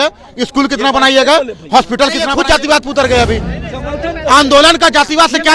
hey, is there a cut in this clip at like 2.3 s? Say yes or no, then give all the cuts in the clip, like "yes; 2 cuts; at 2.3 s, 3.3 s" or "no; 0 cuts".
yes; 1 cut; at 2.3 s